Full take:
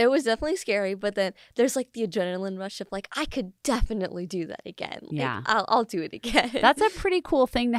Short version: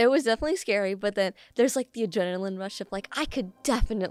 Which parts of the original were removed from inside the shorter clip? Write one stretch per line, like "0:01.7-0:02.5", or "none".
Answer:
none